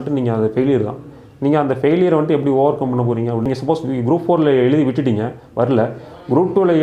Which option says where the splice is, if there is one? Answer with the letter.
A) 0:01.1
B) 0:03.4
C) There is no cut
B